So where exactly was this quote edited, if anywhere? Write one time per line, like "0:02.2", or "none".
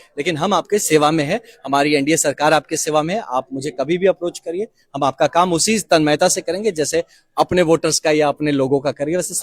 none